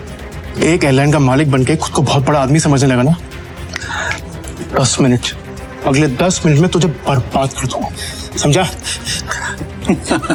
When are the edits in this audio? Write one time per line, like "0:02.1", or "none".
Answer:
none